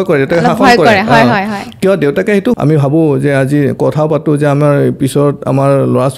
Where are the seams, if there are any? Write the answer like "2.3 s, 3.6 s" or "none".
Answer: 2.6 s